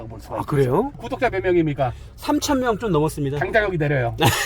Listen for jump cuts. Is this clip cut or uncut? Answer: cut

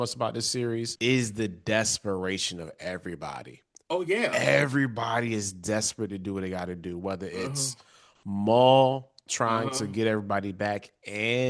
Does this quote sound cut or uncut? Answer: cut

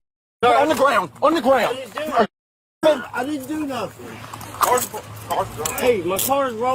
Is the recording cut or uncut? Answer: cut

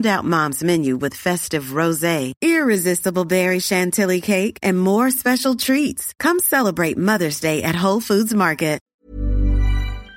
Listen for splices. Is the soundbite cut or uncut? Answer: cut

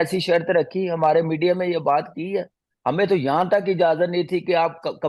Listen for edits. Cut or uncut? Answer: uncut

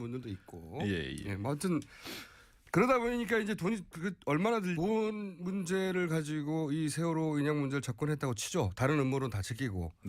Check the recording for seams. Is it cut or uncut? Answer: uncut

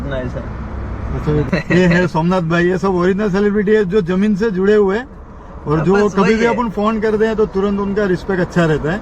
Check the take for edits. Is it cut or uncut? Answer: cut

